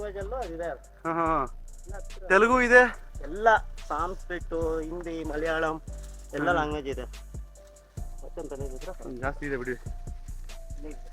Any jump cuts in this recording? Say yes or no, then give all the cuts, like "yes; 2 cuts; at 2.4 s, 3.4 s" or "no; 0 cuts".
no; 0 cuts